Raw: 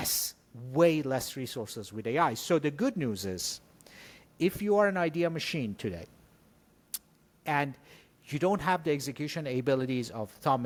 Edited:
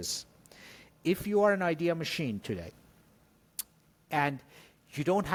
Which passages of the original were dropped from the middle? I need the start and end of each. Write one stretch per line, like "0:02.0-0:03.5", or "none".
none